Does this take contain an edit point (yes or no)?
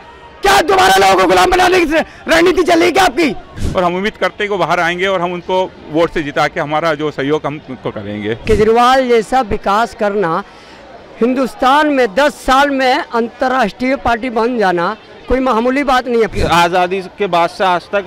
yes